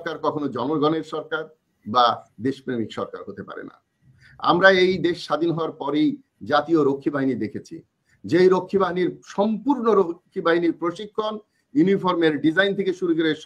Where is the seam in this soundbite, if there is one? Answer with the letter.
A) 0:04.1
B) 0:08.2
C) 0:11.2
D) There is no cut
D